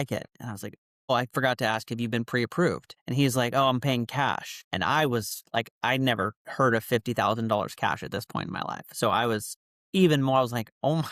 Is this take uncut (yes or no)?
yes